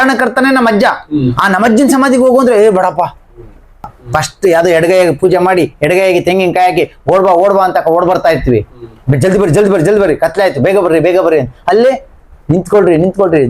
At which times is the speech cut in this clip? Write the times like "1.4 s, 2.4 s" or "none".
3.9 s